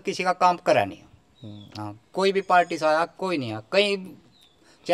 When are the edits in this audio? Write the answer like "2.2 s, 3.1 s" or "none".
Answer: none